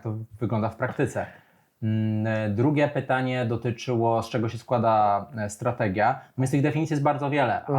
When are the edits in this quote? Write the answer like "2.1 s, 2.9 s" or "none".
none